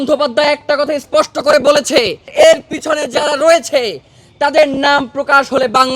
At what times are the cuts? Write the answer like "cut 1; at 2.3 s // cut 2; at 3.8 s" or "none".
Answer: cut 1; at 2.2 s